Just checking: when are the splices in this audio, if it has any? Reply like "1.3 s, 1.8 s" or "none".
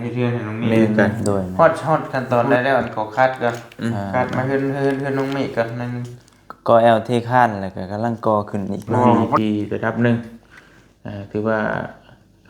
1.5 s, 9.4 s